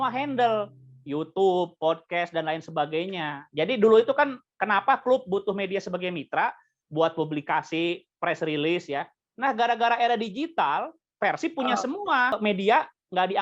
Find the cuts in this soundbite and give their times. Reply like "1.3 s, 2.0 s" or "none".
12.4 s